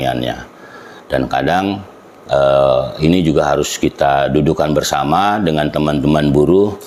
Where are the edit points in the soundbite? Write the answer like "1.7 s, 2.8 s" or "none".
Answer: none